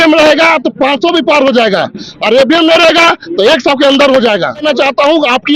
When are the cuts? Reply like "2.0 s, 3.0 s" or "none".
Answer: 4.6 s